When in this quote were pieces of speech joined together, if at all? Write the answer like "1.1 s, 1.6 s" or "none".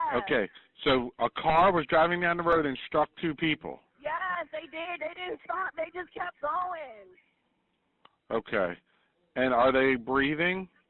4.9 s